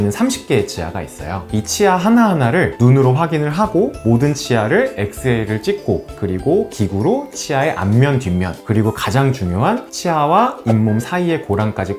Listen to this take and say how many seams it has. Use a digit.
0